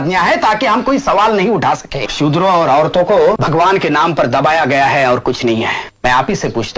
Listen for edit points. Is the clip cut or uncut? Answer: cut